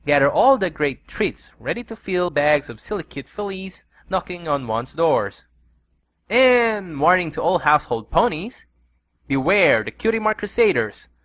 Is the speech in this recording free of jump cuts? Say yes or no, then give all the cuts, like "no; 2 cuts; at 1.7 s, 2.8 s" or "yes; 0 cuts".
yes; 0 cuts